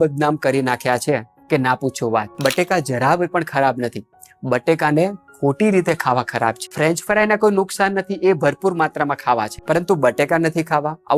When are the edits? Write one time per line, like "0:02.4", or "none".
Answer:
0:06.7
0:09.6